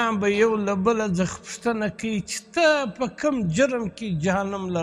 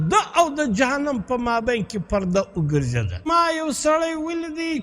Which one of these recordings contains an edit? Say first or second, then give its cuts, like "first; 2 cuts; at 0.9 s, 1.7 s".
second; 1 cut; at 3.3 s